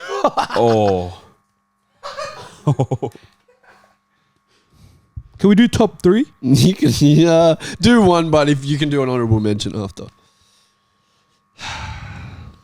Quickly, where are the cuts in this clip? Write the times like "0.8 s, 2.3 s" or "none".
none